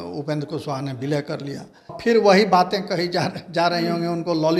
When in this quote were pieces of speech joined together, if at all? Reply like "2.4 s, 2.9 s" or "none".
2.0 s